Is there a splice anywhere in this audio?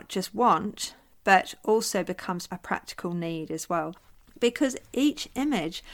yes; 2 cuts; at 2.5 s, 4.1 s

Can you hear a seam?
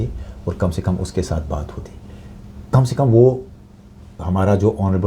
no; 0 cuts

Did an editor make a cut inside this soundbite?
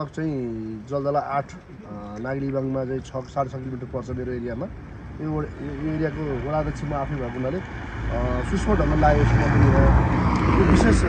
no; 0 cuts

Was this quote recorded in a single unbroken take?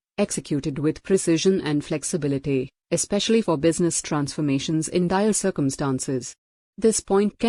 yes; 0 cuts

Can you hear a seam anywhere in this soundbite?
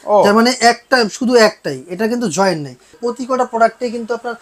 yes; 1 cut; at 3.0 s

